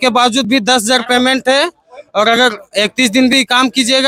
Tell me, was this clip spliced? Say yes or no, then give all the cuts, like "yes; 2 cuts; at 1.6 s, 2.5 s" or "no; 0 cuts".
no; 0 cuts